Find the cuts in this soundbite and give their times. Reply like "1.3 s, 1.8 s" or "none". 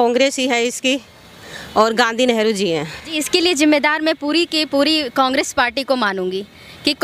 3.2 s